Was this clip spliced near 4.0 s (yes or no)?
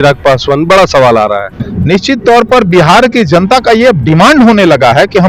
no